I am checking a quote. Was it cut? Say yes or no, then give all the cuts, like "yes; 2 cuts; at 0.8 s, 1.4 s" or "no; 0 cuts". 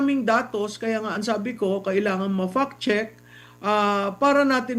no; 0 cuts